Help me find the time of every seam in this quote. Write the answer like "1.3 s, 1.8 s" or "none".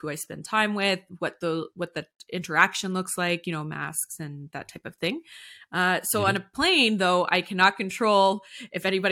none